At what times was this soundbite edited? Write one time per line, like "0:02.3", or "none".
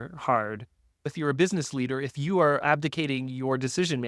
0:01.1
0:02.6